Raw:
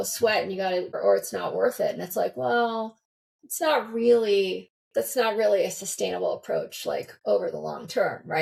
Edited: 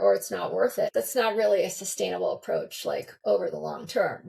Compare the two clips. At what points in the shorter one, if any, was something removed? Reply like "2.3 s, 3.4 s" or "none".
0.9 s